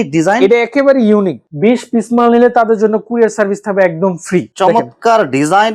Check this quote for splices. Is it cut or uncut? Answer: cut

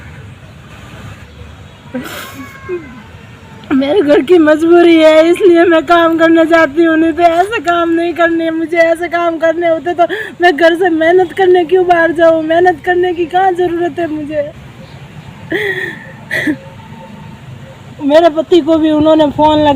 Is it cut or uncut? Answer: cut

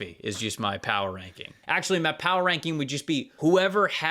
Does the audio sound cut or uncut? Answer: cut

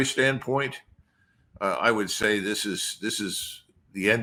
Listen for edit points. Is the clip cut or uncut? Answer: uncut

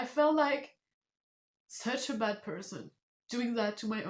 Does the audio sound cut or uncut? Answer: uncut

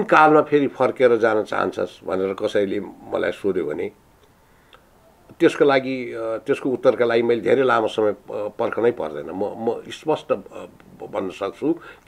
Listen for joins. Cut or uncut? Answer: uncut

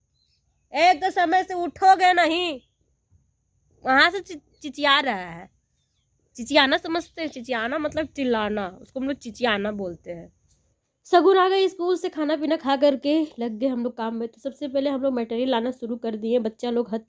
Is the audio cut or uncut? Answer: uncut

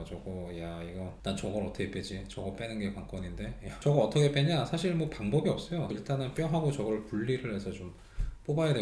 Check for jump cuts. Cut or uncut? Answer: cut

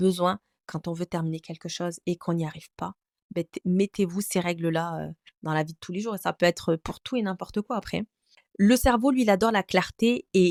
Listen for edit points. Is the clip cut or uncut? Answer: uncut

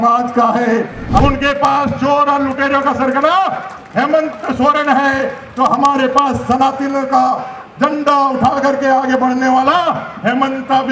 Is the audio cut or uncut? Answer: cut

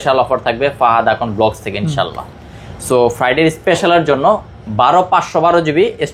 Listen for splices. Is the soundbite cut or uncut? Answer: uncut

